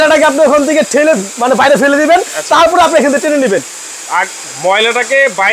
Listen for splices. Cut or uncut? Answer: uncut